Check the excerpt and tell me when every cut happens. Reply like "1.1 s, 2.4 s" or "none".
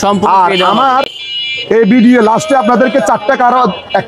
none